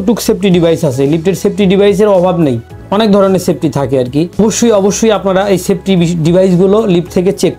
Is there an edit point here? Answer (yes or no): no